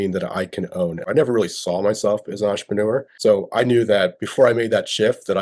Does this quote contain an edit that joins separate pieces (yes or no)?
yes